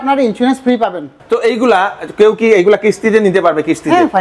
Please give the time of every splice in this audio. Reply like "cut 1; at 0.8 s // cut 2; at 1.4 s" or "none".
cut 1; at 1.2 s